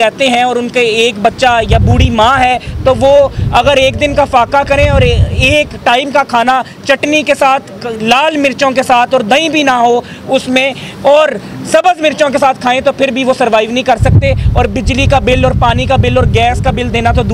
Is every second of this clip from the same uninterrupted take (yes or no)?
yes